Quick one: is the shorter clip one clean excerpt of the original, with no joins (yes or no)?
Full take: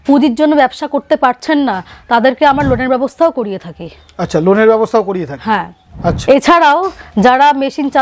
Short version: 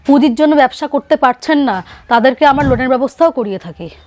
yes